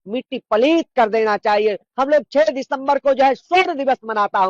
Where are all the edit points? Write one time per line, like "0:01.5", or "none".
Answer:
0:01.9